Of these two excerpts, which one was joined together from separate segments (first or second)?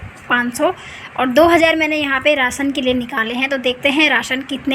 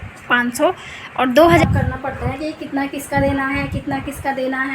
second